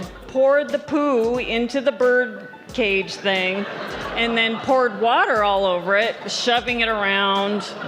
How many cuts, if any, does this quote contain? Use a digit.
0